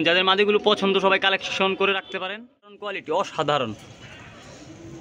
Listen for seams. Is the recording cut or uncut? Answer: cut